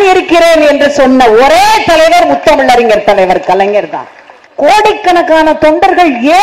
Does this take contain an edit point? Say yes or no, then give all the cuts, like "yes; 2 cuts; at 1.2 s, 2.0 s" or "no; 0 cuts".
no; 0 cuts